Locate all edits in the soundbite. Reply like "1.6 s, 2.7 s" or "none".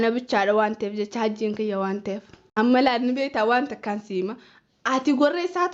2.4 s